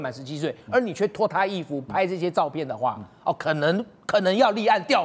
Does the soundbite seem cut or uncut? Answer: uncut